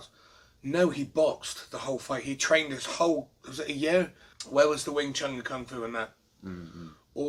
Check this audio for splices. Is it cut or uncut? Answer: uncut